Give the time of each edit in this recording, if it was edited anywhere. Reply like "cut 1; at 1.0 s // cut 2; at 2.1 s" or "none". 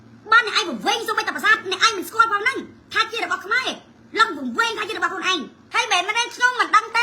cut 1; at 5.6 s